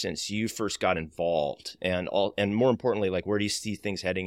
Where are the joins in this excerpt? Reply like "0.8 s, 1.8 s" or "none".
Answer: none